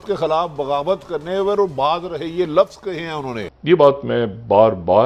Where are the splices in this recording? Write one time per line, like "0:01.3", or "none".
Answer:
0:03.5